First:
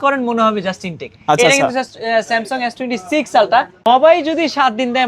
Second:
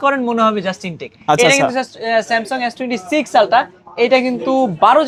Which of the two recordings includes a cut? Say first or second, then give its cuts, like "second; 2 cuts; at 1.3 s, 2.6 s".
first; 1 cut; at 3.7 s